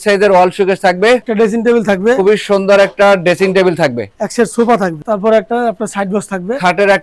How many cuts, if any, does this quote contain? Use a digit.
2